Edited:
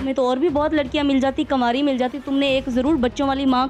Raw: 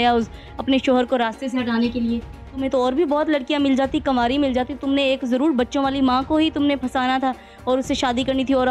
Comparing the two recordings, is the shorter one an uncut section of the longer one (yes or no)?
yes